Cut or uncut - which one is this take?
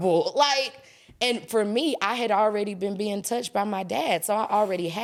uncut